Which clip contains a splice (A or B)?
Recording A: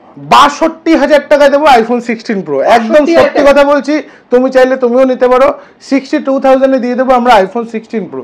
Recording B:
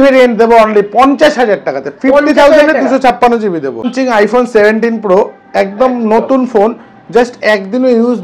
B